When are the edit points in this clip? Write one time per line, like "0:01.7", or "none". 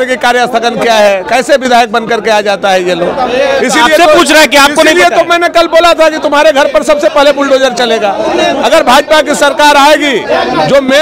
none